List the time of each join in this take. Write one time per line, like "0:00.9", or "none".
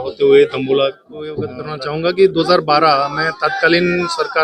0:01.6